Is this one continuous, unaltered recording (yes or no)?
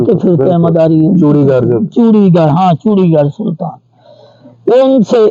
yes